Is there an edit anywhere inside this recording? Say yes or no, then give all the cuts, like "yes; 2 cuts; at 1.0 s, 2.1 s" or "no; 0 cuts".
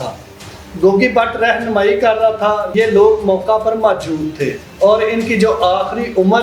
yes; 2 cuts; at 2.7 s, 4.6 s